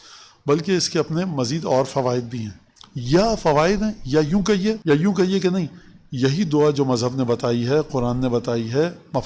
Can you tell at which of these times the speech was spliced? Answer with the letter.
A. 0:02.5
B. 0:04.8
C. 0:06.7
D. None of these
B